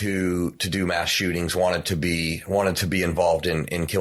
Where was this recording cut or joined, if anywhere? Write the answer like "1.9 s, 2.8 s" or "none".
none